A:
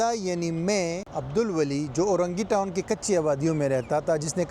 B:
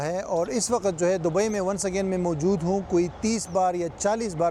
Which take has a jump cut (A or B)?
A